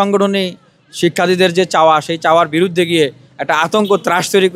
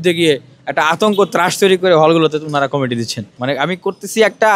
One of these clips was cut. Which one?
second; 1 cut; at 3.4 s

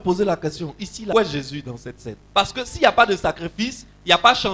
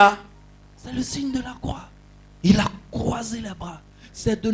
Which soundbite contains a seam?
first; 2 cuts; at 1.1 s, 2.1 s

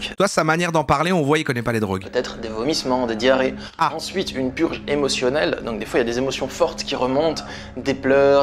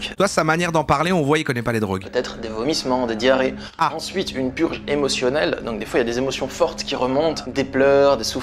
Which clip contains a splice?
second; 1 cut; at 7.4 s

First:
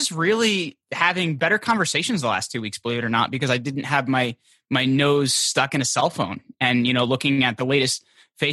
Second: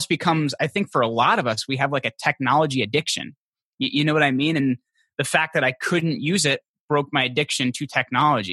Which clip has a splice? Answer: first; 1 cut; at 1.3 s

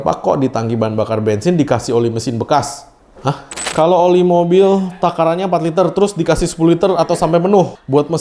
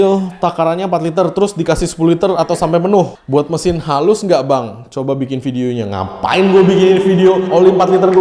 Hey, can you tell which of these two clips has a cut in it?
first; 1 cut; at 3.7 s

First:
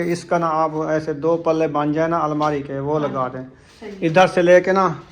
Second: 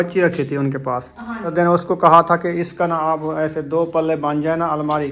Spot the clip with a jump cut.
second; 1 cut; at 1.5 s

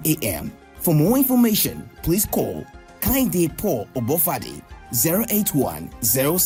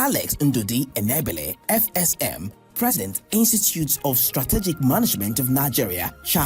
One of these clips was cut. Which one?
second; 1 cut; at 3.0 s

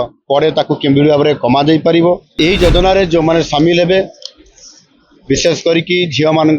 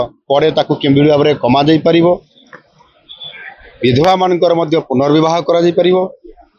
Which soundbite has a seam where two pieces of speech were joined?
first; 1 cut; at 2.3 s

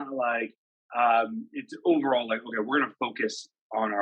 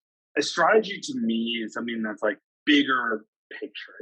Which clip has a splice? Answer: second; 1 cut; at 2.5 s

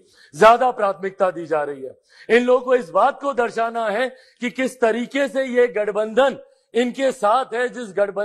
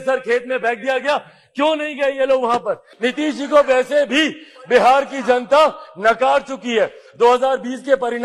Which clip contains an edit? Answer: second; 1 cut; at 2.9 s

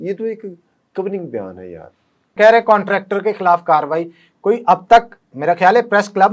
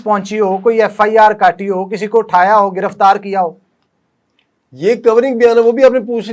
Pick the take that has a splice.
first; 1 cut; at 2.3 s

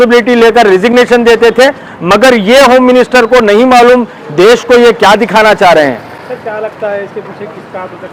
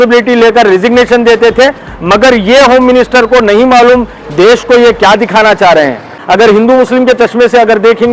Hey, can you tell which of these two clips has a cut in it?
second; 1 cut; at 6.1 s

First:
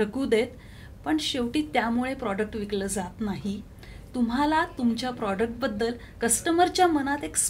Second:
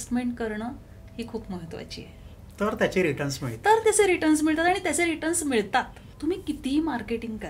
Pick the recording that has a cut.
second; 1 cut; at 6.1 s

